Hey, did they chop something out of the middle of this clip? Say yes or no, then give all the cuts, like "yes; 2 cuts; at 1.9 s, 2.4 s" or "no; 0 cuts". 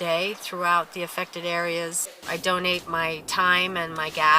yes; 1 cut; at 2.1 s